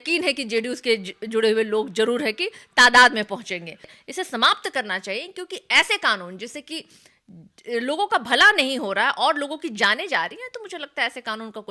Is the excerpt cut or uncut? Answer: cut